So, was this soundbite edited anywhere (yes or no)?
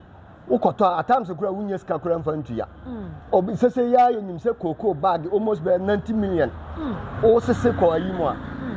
no